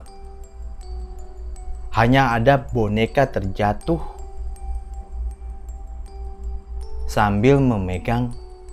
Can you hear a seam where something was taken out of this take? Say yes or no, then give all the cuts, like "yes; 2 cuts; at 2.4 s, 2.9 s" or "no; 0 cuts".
no; 0 cuts